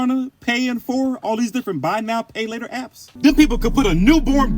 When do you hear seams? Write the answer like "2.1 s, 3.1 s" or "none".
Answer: 3.0 s